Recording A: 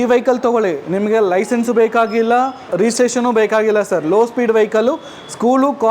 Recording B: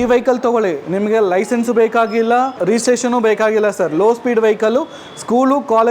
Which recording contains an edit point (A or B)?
B